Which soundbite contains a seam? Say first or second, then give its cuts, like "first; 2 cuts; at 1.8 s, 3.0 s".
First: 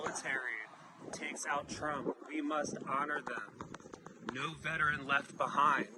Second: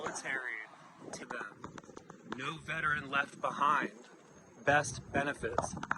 second; 1 cut; at 1.3 s